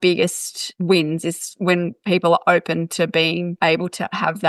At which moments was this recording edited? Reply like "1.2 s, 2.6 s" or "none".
3.5 s